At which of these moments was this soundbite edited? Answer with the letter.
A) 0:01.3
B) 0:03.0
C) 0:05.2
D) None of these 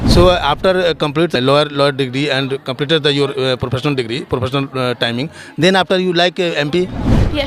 A